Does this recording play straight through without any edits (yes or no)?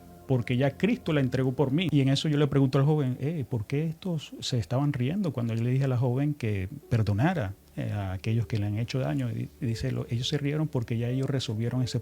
no